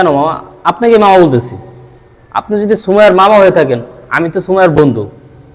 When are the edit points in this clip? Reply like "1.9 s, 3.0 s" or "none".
none